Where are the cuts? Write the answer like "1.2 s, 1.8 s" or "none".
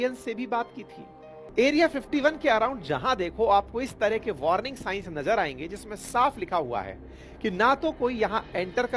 1.4 s